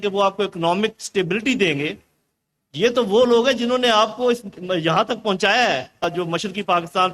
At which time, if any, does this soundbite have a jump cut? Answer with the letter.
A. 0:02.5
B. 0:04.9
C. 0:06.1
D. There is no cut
C